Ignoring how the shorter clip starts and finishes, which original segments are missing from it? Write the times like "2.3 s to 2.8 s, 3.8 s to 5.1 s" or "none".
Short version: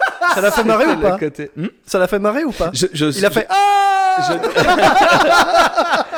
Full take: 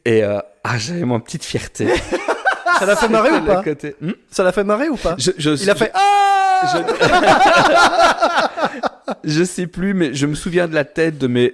none